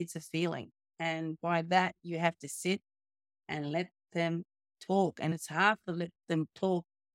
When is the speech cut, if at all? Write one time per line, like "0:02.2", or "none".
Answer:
none